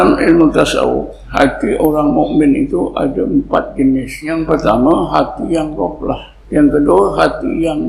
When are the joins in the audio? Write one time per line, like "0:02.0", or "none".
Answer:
0:01.2
0:04.3
0:06.3